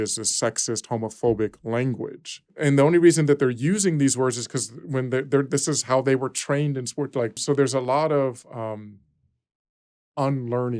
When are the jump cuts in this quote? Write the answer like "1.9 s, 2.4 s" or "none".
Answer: 2.5 s, 7.4 s